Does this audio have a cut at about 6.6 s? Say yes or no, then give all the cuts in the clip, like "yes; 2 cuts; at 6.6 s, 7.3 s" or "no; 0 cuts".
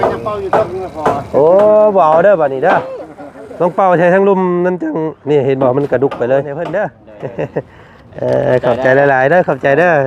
yes; 1 cut; at 6.6 s